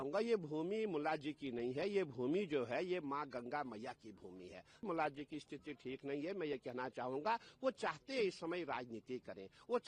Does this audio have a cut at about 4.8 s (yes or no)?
yes